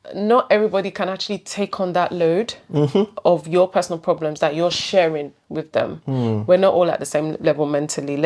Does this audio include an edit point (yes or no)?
no